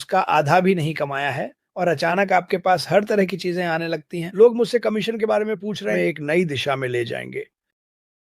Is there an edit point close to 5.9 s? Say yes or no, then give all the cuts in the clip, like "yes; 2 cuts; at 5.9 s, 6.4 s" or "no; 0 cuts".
yes; 2 cuts; at 4.2 s, 5.9 s